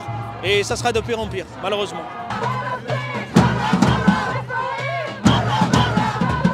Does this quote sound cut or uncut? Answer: uncut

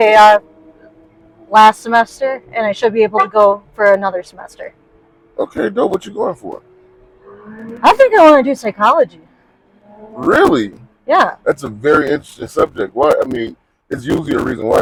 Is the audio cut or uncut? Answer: uncut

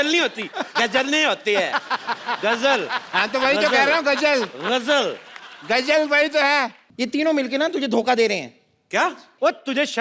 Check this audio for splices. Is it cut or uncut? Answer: cut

